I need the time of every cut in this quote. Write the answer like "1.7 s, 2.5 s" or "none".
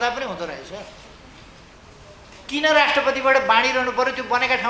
1.7 s